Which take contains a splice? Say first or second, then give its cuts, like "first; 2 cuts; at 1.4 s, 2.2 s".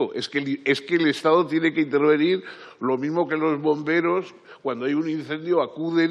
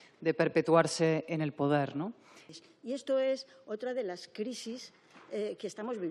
second; 1 cut; at 2.4 s